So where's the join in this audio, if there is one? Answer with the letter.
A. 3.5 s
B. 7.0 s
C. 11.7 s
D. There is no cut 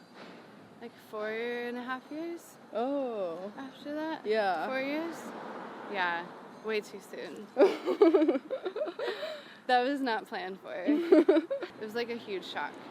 C